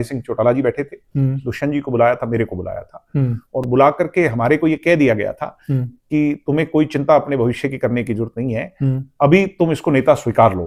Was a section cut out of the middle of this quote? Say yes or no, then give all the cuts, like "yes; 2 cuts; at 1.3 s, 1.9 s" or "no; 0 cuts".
no; 0 cuts